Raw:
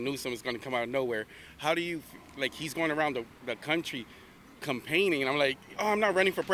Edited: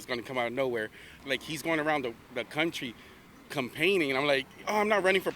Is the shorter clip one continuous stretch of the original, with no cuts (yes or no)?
no